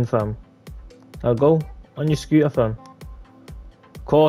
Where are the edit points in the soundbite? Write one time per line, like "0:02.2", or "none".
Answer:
none